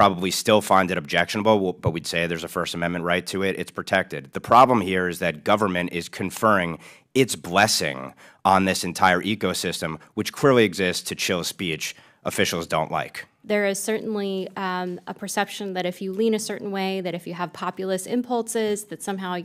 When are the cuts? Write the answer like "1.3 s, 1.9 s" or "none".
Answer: 13.2 s